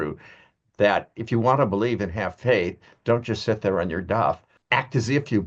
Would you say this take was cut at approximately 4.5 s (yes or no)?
yes